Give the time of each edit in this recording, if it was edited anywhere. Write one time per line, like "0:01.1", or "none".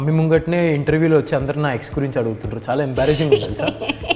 none